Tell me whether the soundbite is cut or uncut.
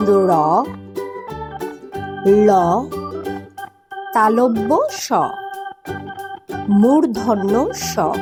uncut